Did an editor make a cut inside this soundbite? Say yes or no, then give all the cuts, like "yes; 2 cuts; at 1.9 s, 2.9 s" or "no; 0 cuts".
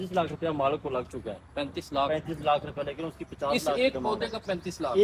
no; 0 cuts